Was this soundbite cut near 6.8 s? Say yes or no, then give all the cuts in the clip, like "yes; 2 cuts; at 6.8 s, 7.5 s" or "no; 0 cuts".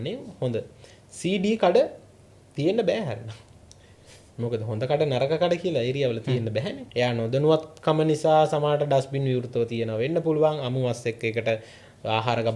yes; 1 cut; at 6.8 s